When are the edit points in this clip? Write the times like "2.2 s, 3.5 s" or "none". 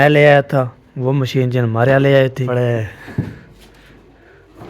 2.5 s